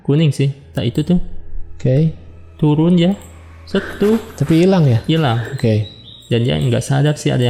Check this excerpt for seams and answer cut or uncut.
uncut